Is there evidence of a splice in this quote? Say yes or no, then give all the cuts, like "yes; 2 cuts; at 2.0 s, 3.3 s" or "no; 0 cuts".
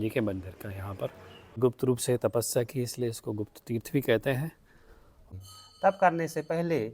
yes; 2 cuts; at 1.6 s, 5.2 s